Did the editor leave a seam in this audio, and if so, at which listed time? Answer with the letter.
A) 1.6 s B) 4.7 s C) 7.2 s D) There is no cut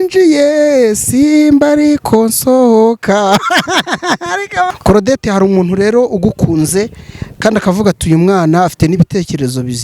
B